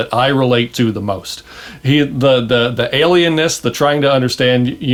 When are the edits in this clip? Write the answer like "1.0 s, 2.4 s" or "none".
none